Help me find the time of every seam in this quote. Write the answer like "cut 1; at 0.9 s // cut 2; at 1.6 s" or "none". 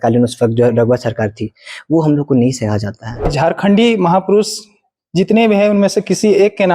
cut 1; at 3.3 s

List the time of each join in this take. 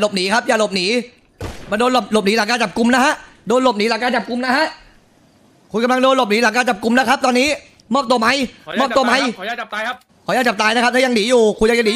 none

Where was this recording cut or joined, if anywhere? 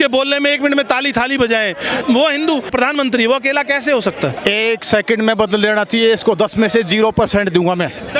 cut 1; at 2.0 s // cut 2; at 2.7 s // cut 3; at 4.4 s

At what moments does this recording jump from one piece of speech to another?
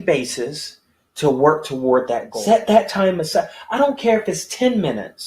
cut 1; at 2.3 s

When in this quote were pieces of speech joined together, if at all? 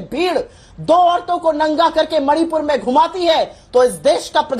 none

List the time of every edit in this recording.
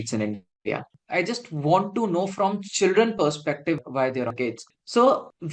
cut 1; at 0.9 s // cut 2; at 4.3 s

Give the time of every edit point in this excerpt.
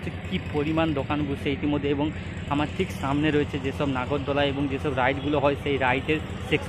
none

